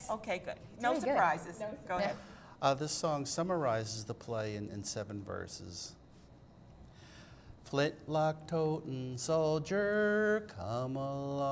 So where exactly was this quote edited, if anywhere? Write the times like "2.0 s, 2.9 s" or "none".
9.5 s